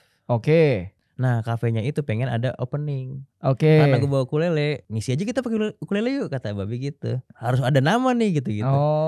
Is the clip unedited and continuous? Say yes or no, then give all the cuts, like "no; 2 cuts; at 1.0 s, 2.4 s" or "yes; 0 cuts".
no; 2 cuts; at 4.9 s, 7.3 s